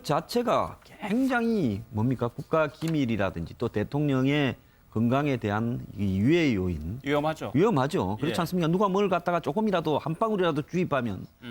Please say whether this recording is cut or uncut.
uncut